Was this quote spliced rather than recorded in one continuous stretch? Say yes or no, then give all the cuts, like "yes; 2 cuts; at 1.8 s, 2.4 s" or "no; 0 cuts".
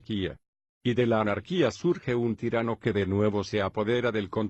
no; 0 cuts